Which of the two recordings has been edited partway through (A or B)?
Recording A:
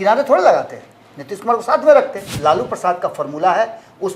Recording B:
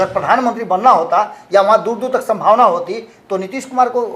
A